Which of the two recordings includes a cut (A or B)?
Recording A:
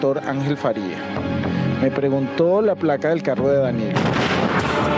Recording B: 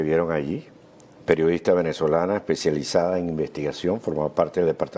A